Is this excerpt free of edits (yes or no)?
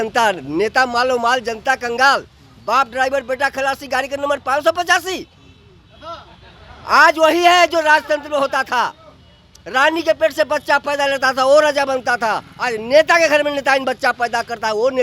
yes